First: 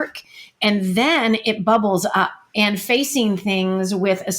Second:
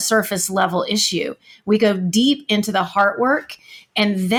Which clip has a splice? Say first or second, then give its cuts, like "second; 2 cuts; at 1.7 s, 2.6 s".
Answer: first; 1 cut; at 2.4 s